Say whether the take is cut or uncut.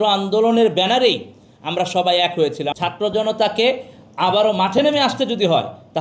cut